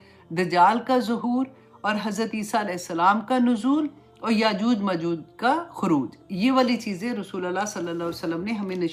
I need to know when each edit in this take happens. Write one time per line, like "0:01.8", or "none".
none

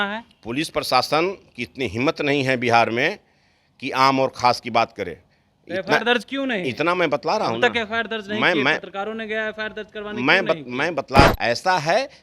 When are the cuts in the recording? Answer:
0:11.3

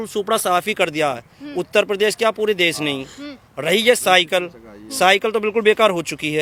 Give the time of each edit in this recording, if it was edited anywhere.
none

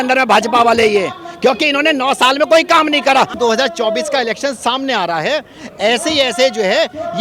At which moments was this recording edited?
0:03.4

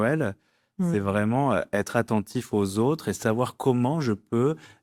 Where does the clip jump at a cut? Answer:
none

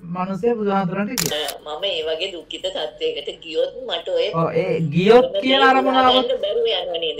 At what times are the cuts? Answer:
0:01.3

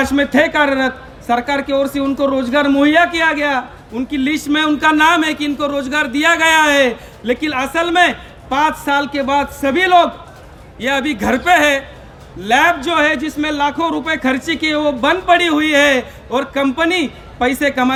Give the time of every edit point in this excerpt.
none

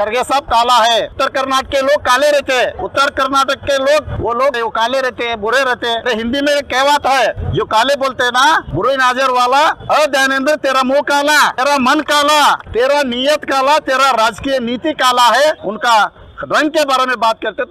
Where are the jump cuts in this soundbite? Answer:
0:01.1
0:02.8
0:04.5
0:06.0
0:07.4
0:08.7
0:11.6
0:12.6
0:15.6

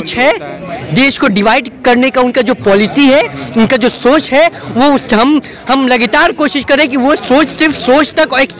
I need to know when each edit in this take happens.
none

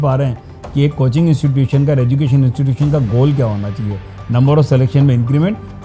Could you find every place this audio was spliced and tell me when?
none

